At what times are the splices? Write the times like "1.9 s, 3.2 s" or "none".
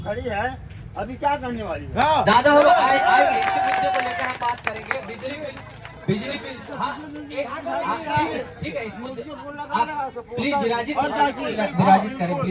none